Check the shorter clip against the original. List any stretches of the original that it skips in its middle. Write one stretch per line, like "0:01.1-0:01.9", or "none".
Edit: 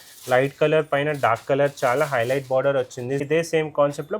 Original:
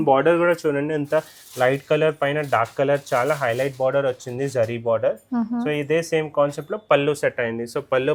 0:04.5-0:05.8